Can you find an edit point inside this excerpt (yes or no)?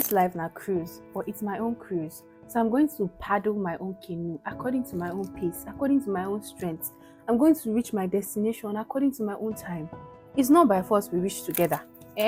no